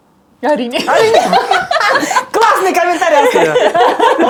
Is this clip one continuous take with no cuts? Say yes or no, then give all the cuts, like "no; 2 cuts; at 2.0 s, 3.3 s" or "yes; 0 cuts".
yes; 0 cuts